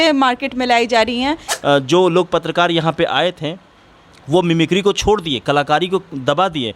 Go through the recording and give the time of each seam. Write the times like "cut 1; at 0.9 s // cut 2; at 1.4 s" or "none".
cut 1; at 1.5 s